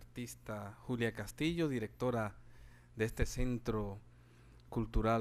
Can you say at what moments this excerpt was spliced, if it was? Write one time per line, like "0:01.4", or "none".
none